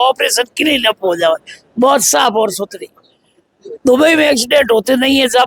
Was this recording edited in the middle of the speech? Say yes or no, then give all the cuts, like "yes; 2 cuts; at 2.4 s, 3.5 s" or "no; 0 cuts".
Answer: no; 0 cuts